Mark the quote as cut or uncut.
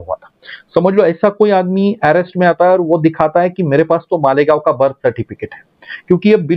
uncut